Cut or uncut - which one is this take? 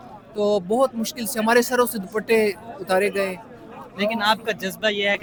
uncut